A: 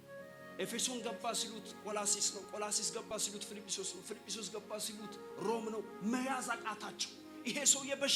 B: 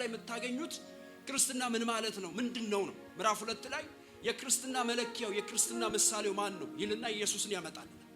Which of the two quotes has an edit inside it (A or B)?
B